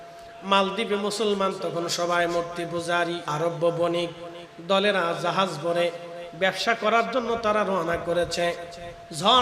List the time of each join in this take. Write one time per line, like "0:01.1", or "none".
0:03.2

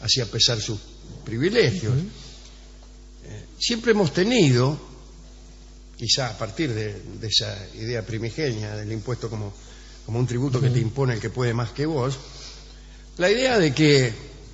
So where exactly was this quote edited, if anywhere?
0:10.8

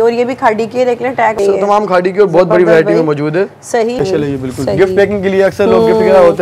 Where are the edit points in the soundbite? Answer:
0:01.4
0:04.0

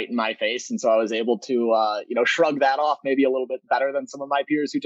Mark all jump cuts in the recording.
none

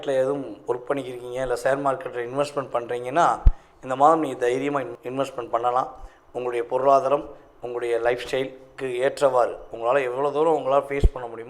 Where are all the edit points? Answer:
none

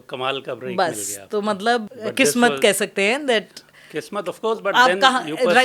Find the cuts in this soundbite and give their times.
0:01.8

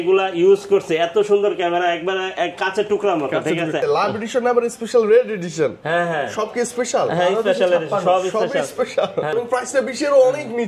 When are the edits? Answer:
0:03.8
0:09.3

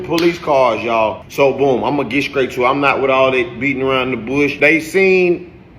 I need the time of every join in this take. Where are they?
0:00.9

